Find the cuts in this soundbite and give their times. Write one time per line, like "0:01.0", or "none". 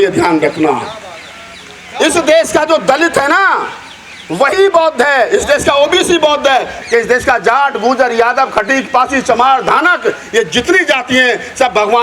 0:06.8